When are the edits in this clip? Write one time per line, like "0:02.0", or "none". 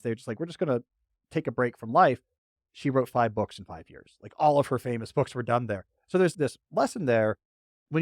0:06.3